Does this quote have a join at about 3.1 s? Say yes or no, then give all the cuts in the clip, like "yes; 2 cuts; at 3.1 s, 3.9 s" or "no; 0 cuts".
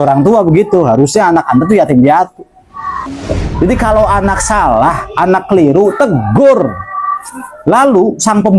yes; 1 cut; at 3.1 s